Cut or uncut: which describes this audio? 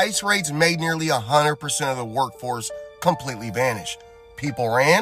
uncut